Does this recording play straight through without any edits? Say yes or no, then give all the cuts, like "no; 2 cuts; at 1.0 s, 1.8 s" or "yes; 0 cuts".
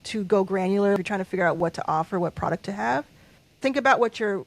no; 2 cuts; at 1.0 s, 3.5 s